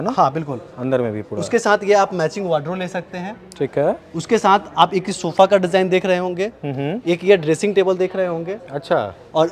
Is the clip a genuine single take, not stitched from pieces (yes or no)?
yes